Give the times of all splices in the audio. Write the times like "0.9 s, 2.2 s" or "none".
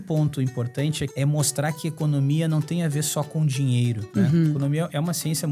1.1 s, 4.0 s